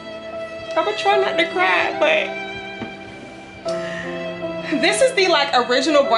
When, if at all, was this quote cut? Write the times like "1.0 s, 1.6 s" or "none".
none